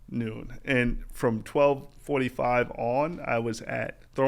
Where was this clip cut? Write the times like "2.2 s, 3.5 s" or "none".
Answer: none